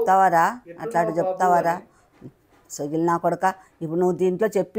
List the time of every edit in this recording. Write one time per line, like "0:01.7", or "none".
none